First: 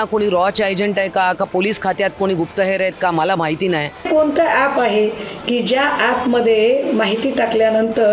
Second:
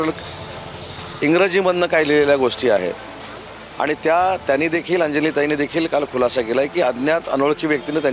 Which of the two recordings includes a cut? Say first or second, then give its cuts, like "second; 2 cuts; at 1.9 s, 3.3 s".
first; 1 cut; at 4.1 s